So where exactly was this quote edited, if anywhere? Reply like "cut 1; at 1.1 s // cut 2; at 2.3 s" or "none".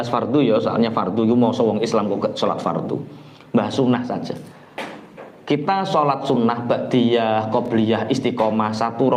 none